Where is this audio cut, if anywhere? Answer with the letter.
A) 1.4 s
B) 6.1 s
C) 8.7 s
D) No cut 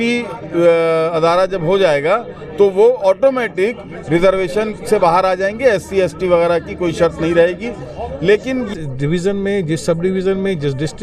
C